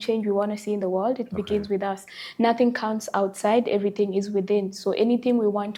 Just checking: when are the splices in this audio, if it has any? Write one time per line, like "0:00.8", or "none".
none